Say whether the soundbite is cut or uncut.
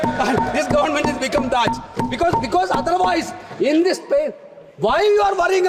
uncut